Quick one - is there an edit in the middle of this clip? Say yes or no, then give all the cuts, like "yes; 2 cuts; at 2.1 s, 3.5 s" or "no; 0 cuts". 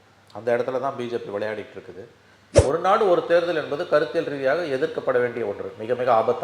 yes; 1 cut; at 2.4 s